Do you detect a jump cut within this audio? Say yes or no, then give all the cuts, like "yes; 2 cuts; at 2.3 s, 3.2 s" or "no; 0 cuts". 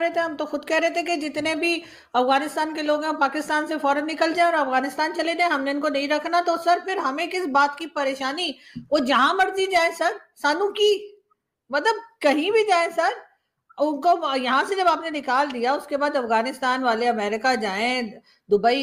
no; 0 cuts